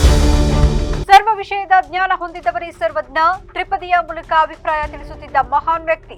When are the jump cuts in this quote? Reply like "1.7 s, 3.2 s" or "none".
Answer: none